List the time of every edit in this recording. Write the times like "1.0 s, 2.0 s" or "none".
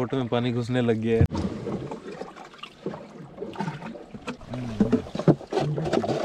none